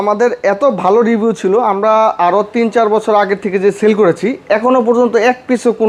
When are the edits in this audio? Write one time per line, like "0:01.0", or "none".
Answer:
none